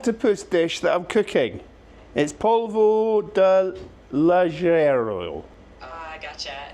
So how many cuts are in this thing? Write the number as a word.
one